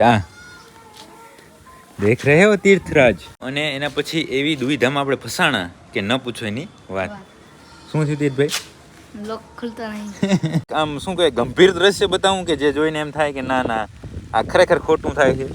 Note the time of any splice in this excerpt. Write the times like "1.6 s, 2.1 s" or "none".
3.4 s, 10.7 s

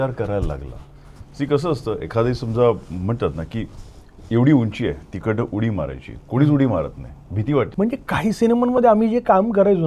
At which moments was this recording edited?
7.7 s

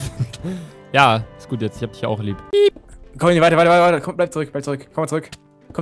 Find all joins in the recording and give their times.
2.5 s

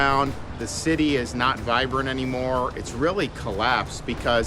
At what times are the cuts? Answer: none

